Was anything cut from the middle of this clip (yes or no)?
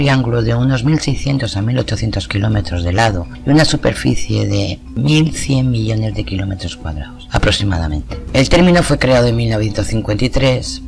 yes